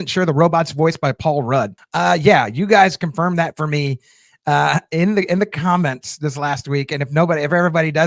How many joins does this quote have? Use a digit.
1